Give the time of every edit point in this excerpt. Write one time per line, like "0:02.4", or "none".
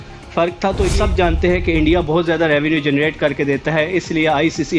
0:00.9